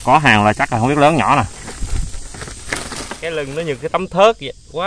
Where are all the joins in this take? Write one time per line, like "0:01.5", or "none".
0:03.2